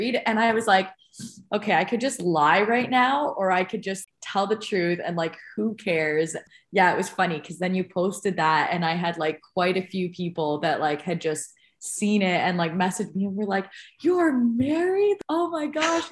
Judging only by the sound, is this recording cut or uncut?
cut